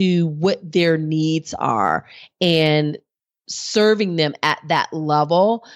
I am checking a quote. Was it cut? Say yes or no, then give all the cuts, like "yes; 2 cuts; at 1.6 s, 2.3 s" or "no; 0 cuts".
no; 0 cuts